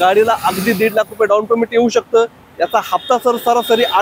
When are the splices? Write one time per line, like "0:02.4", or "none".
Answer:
none